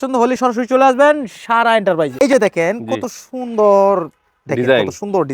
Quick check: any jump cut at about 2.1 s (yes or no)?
yes